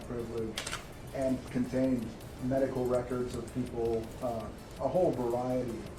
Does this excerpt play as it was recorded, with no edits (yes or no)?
yes